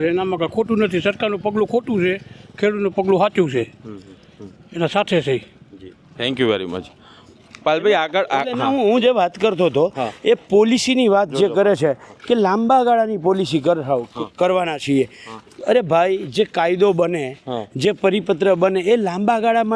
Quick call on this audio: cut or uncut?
uncut